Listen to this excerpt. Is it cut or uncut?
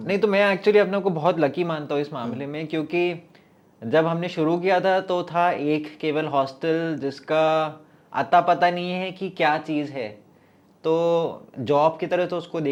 uncut